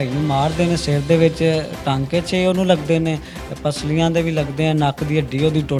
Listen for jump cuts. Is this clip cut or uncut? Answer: uncut